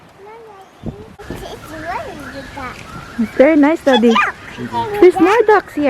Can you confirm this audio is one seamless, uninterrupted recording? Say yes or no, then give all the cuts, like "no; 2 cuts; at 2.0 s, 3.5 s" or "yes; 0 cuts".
no; 1 cut; at 1.2 s